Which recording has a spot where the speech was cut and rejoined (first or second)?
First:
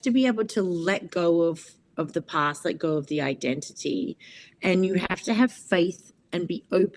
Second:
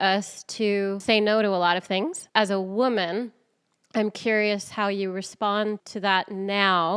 second